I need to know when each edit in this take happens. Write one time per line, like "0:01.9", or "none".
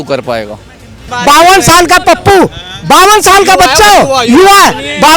0:01.1